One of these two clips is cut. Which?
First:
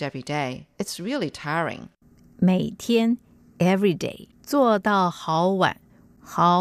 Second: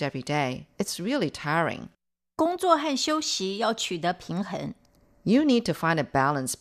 second; 1 cut; at 2.3 s

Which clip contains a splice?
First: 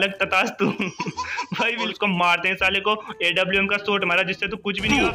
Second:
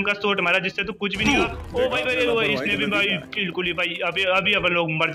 first; 1 cut; at 1.9 s

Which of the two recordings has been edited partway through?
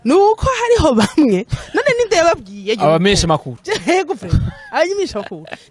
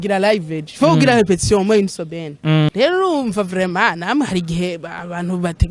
second; 1 cut; at 2.7 s

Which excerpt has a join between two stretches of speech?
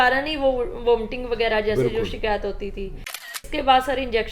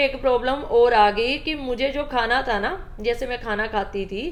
first; 1 cut; at 3.1 s

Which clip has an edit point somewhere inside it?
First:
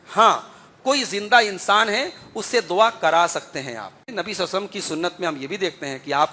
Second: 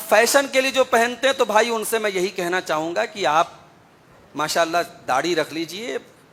first; 1 cut; at 4.1 s

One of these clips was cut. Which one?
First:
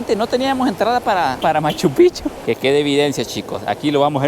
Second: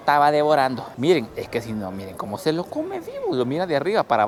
first; 1 cut; at 2.4 s

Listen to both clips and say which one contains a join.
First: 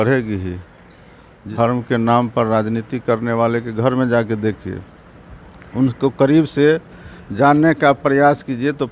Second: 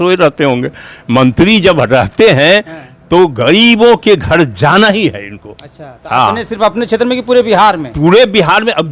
first; 1 cut; at 1.5 s

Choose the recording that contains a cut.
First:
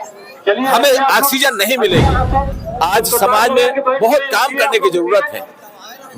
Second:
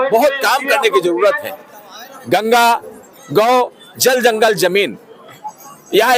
first; 1 cut; at 2.5 s

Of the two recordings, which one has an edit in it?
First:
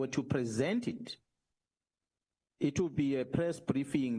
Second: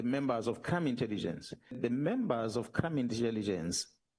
second; 1 cut; at 1.8 s

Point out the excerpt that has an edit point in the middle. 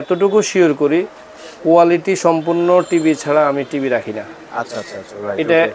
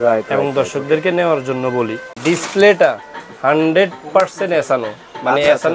second; 1 cut; at 2.0 s

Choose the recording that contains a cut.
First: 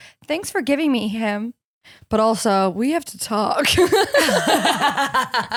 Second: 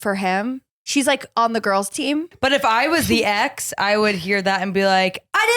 second; 1 cut; at 2.3 s

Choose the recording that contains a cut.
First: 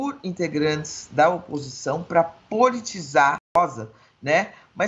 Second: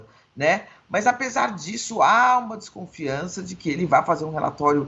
first; 1 cut; at 3.6 s

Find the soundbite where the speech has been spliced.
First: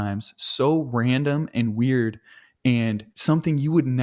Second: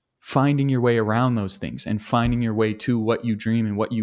first; 1 cut; at 3.1 s

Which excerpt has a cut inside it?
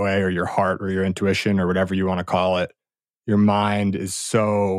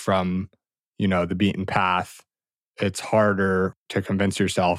second; 1 cut; at 3.8 s

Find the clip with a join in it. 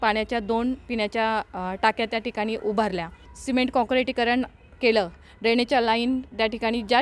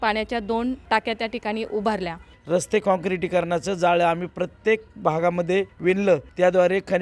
second; 3 cuts; at 0.8 s, 2.3 s, 6.0 s

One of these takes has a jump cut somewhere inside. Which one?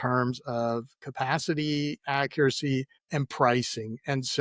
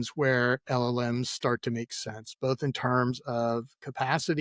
first; 1 cut; at 3.0 s

